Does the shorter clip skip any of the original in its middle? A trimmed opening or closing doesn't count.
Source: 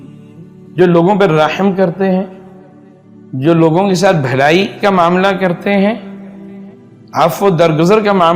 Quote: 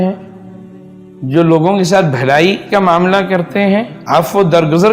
yes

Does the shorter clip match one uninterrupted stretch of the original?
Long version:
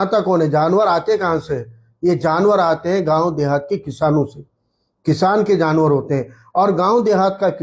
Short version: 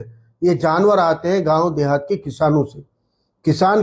yes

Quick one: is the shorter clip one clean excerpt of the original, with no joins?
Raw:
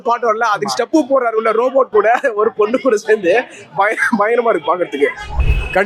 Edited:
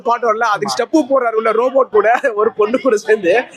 yes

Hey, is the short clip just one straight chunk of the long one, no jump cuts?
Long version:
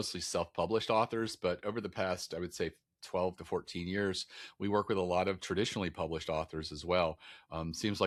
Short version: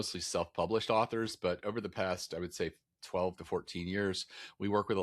yes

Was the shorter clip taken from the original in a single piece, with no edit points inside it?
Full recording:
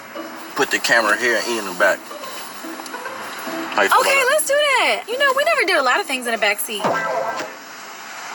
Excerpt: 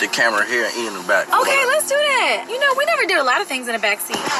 no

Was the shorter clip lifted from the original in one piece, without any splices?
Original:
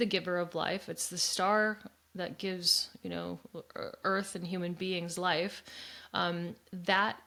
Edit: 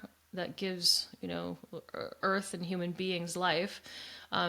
yes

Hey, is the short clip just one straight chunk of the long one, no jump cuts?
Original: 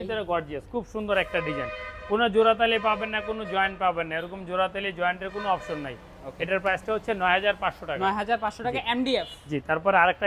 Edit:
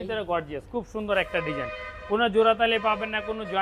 yes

